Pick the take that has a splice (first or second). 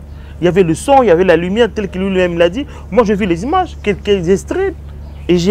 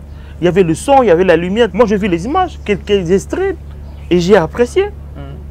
second